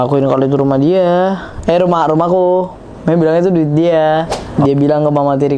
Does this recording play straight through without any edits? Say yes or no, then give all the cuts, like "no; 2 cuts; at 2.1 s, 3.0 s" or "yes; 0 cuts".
no; 1 cut; at 4.4 s